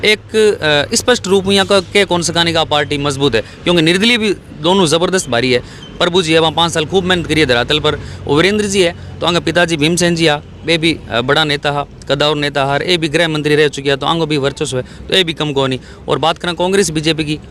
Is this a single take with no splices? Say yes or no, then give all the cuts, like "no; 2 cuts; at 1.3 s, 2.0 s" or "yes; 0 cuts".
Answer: no; 1 cut; at 8.1 s